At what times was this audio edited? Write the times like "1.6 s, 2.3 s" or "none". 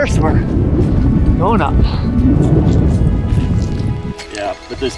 4.1 s